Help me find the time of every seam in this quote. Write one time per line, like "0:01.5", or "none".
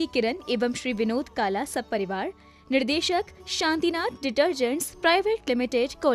none